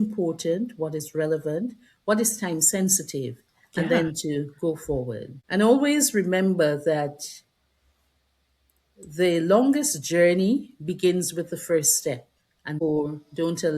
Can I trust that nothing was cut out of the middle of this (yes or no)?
no